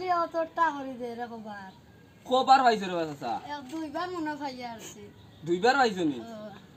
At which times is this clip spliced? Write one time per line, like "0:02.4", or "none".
none